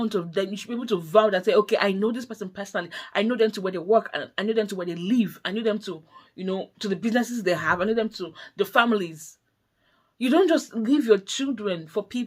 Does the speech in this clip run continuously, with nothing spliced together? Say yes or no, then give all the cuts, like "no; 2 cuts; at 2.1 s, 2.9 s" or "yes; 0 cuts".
yes; 0 cuts